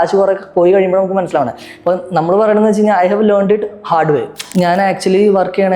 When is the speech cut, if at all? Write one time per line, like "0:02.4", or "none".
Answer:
0:04.4